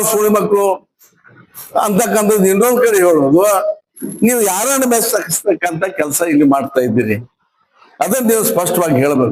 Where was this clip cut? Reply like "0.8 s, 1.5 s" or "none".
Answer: none